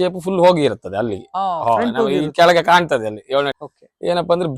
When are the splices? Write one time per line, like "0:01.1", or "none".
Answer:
0:03.6